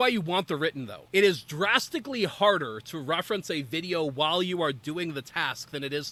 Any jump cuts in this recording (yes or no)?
no